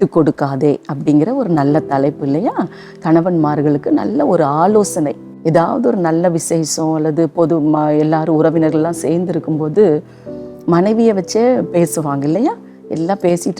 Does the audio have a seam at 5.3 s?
yes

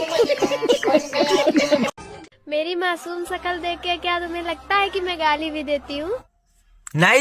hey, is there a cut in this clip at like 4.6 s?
no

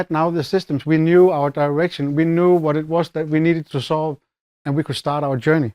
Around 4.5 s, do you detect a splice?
yes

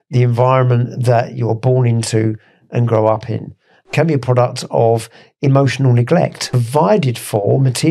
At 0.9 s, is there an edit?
no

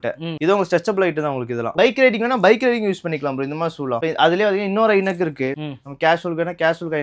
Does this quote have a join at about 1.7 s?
yes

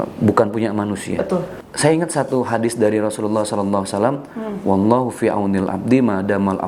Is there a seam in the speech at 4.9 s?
no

